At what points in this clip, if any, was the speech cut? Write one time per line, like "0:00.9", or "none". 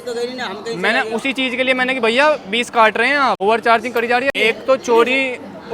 0:03.4
0:04.3